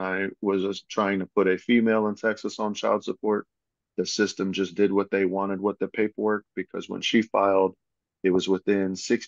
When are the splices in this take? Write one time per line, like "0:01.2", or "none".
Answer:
none